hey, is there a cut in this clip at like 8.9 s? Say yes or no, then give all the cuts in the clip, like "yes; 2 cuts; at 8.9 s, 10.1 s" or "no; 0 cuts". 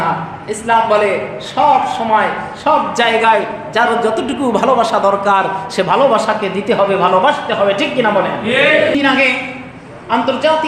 yes; 1 cut; at 8.9 s